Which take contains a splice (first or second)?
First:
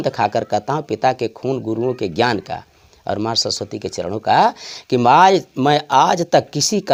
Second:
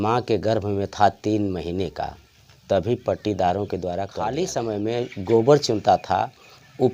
second